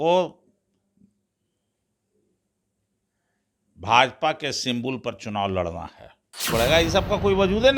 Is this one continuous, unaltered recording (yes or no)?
no